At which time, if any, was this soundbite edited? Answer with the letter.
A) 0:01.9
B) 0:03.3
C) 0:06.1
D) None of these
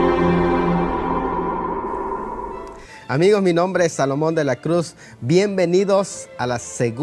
D